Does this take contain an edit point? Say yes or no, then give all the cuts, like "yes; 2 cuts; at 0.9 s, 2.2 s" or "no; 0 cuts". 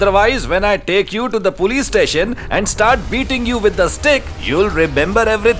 no; 0 cuts